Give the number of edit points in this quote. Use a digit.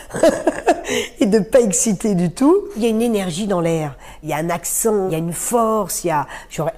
3